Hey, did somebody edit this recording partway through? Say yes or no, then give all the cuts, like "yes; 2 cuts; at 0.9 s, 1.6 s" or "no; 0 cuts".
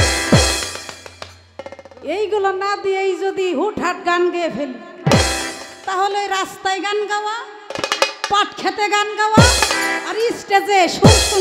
no; 0 cuts